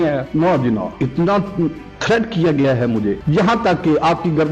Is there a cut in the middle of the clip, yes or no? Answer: yes